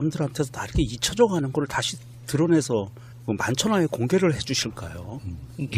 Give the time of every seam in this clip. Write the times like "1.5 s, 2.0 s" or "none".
none